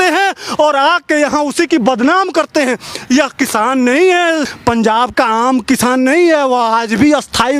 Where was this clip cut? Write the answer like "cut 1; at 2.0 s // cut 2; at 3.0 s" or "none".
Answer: cut 1; at 4.5 s